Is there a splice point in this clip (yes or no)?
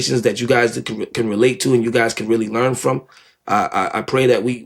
no